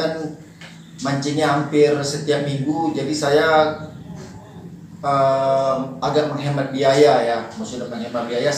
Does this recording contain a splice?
no; 0 cuts

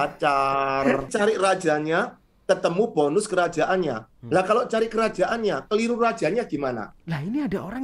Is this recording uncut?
no; 2 cuts; at 1.1 s, 6.9 s

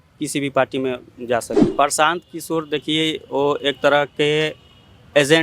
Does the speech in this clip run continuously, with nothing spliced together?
no; 1 cut; at 1.6 s

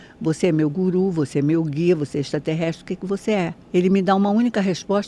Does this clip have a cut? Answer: no; 0 cuts

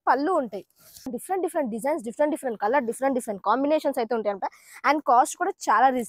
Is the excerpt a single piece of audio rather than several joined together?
no; 1 cut; at 1.1 s

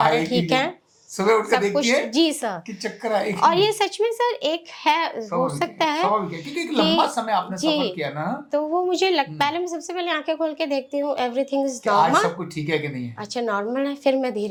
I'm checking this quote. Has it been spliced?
no; 0 cuts

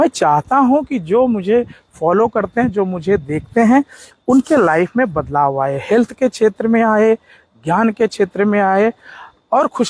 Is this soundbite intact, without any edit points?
yes; 0 cuts

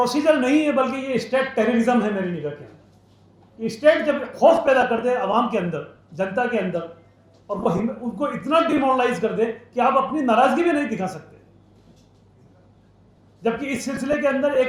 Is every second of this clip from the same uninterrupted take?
yes; 0 cuts

